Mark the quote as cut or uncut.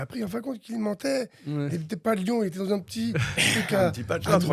uncut